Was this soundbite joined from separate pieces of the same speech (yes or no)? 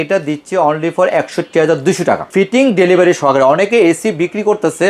yes